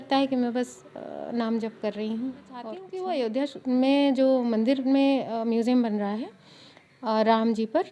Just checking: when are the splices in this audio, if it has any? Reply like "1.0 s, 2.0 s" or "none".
2.9 s